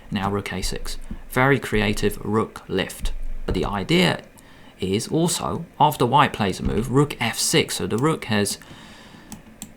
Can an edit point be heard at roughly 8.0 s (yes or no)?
no